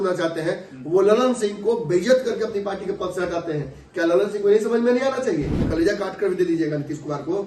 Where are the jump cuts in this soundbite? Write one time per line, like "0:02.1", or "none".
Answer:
0:05.7